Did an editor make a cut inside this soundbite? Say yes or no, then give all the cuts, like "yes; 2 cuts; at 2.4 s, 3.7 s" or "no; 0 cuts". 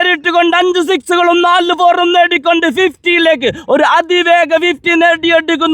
no; 0 cuts